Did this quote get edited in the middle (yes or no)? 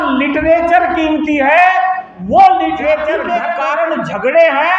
yes